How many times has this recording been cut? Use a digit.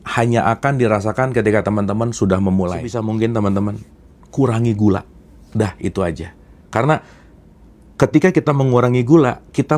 1